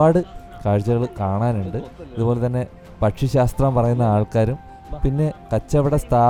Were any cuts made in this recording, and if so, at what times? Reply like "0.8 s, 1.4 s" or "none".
none